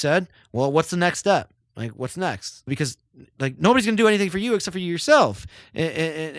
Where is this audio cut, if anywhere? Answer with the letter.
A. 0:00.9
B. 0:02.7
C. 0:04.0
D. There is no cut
B